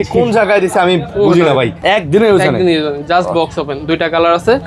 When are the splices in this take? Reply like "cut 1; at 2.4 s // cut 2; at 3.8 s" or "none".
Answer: cut 1; at 1.8 s